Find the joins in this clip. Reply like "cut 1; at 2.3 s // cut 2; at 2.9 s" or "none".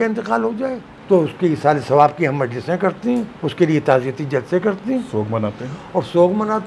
cut 1; at 0.9 s // cut 2; at 3.4 s